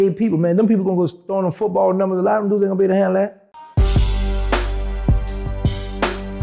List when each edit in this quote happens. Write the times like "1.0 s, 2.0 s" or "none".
4.0 s